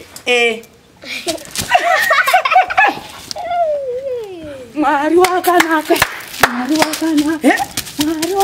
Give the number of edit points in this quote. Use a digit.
0